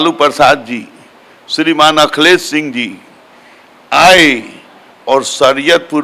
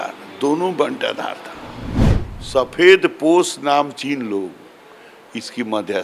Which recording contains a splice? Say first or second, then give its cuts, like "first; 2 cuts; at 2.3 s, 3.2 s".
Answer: second; 1 cut; at 2.0 s